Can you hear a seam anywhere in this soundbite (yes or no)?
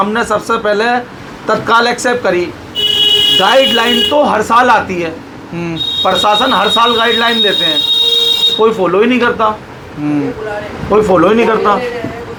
no